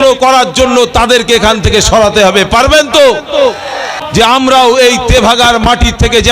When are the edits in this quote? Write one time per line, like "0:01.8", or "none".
0:04.0